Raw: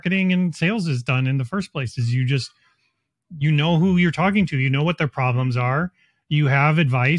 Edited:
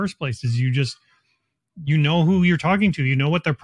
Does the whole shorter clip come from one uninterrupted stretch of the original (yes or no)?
yes